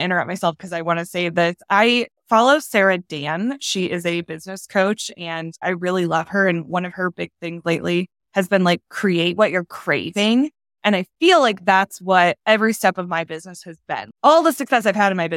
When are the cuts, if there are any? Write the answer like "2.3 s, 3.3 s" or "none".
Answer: 14.0 s

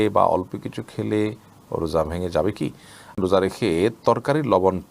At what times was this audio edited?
3.2 s

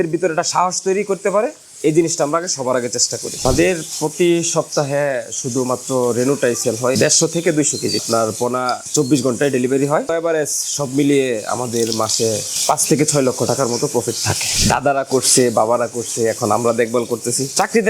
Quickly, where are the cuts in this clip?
3.4 s, 8.0 s, 10.1 s, 14.5 s

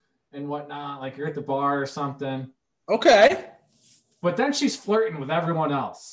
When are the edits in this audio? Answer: none

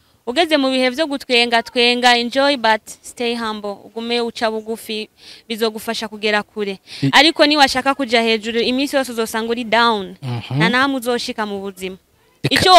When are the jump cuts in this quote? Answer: none

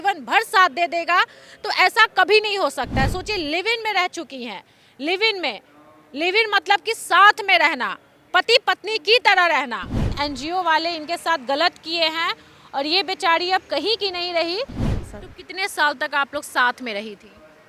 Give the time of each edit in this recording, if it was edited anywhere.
10.0 s, 14.9 s

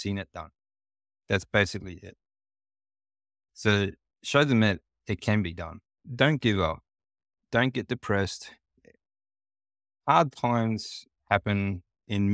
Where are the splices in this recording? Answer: 6.1 s, 8.8 s

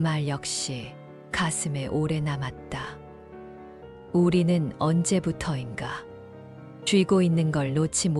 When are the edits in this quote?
none

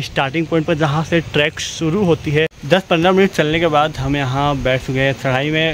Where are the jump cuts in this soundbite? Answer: 2.6 s

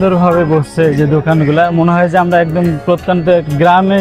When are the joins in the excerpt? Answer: none

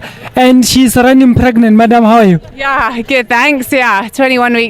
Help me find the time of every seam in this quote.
none

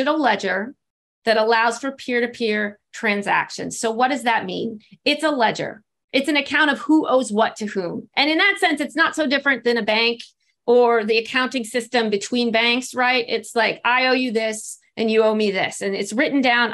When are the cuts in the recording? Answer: none

